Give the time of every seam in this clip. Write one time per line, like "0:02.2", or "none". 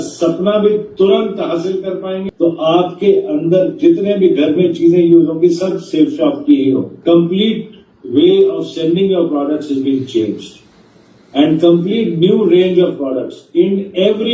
0:02.2
0:06.9